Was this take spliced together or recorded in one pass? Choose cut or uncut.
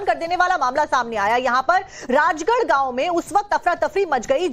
cut